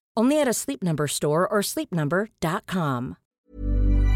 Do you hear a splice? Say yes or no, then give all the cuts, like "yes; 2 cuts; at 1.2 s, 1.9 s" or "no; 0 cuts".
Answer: yes; 1 cut; at 3.2 s